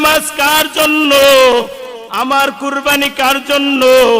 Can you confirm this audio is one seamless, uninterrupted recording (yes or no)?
no